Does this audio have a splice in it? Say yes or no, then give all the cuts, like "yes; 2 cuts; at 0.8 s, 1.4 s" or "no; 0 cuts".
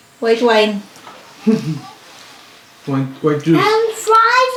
no; 0 cuts